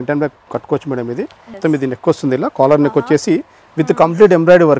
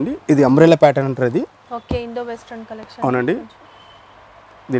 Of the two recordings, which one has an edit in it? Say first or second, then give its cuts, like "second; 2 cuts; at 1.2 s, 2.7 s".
first; 1 cut; at 1.5 s